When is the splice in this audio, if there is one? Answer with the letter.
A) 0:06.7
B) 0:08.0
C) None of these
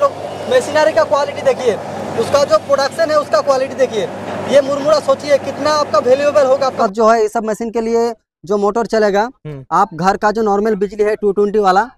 A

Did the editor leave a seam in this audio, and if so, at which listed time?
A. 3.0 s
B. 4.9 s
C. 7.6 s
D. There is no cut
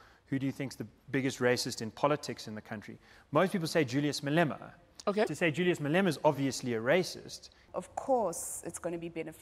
C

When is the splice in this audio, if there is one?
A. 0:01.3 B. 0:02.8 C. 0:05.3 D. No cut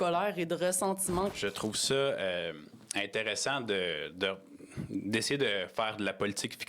A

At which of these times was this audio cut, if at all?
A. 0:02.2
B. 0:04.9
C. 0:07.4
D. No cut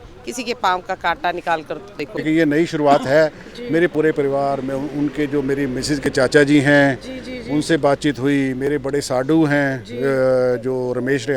A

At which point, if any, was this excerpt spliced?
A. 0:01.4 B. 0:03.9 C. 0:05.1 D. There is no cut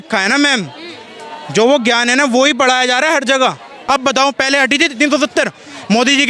B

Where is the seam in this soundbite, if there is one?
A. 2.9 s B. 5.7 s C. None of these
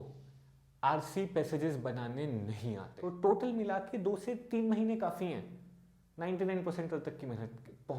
A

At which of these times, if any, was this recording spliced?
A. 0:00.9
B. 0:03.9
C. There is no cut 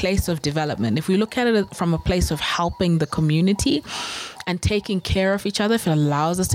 C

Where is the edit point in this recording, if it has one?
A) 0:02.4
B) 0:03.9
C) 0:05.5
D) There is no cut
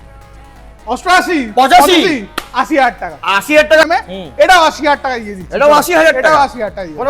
B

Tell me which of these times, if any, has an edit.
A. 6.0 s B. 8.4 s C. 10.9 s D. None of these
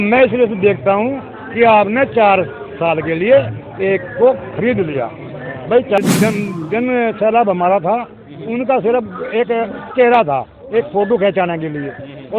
A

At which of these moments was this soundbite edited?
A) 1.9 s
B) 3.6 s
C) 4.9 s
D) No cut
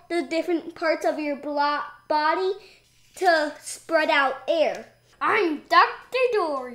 C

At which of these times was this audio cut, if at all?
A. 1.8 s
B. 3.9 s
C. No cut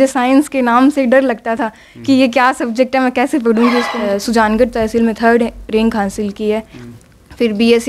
B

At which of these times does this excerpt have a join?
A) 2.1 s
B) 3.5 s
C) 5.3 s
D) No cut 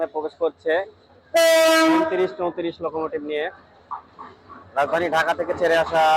D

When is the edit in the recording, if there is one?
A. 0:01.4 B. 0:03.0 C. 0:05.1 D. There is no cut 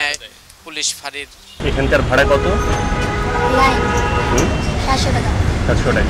A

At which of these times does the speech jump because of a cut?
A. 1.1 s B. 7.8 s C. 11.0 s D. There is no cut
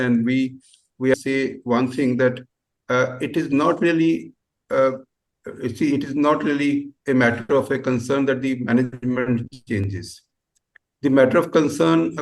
A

